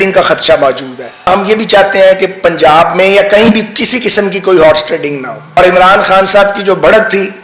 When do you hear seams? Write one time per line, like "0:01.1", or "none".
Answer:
0:01.3
0:05.6